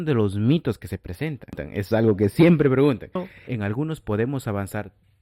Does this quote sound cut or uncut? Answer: cut